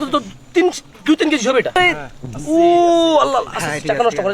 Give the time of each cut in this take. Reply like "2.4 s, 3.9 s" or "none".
none